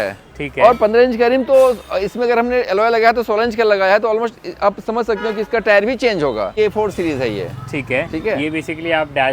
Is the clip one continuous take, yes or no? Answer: no